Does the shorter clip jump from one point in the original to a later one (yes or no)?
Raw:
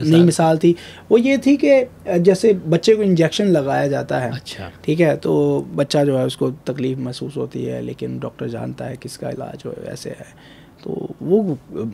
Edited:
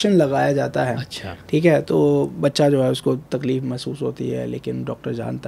no